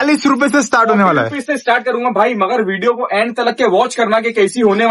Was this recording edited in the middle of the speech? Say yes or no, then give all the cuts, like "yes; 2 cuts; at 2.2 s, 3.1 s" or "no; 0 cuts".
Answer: no; 0 cuts